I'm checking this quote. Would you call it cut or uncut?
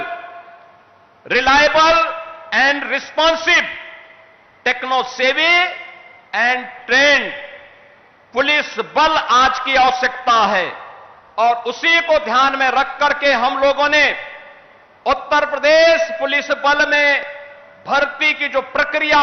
uncut